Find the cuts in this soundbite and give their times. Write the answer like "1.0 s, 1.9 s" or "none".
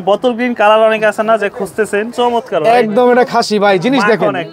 2.1 s